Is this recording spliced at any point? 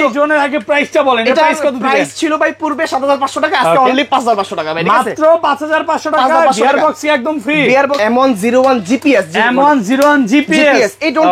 yes; 1 cut; at 8.0 s

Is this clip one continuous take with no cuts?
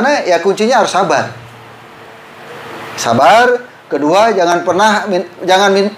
yes; 0 cuts

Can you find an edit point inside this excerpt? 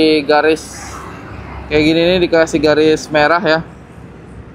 no; 0 cuts

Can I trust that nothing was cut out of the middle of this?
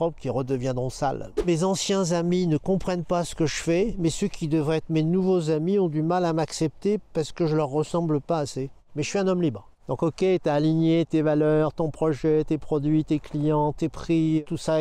no; 1 cut; at 1.4 s

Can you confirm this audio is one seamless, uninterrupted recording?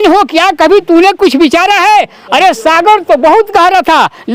yes; 0 cuts

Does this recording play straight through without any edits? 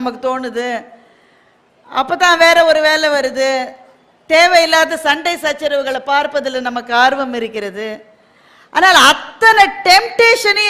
yes; 0 cuts

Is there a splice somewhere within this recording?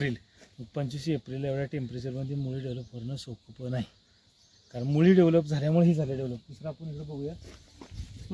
no; 0 cuts

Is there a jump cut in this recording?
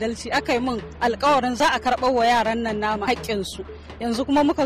yes; 2 cuts; at 1.6 s, 3.1 s

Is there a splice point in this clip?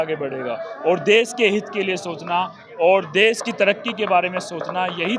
no; 0 cuts

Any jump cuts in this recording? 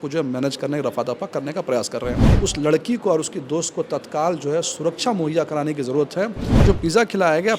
yes; 2 cuts; at 2.3 s, 6.6 s

